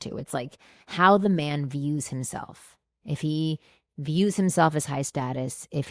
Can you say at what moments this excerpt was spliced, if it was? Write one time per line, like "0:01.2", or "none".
none

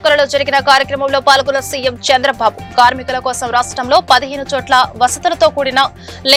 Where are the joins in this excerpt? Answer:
none

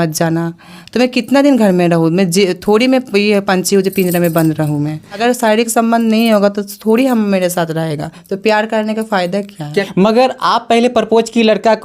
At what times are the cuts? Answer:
0:05.2
0:09.9

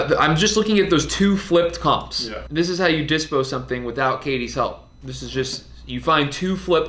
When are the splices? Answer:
0:02.4

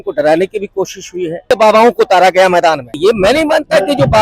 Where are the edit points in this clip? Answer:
0:01.5
0:02.9

